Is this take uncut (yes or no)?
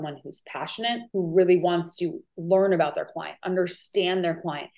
no